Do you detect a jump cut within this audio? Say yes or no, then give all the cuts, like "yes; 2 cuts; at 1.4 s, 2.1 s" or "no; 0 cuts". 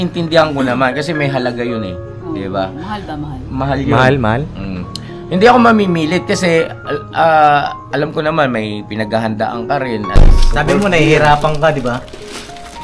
yes; 1 cut; at 10.1 s